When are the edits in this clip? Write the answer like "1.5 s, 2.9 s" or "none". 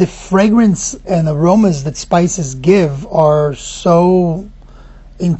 1.0 s